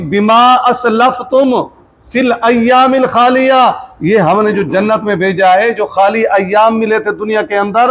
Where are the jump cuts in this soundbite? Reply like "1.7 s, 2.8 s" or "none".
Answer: none